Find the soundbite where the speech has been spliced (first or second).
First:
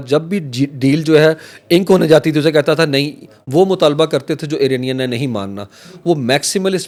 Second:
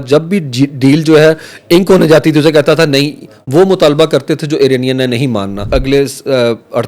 second